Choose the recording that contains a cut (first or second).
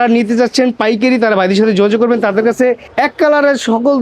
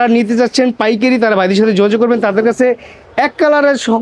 first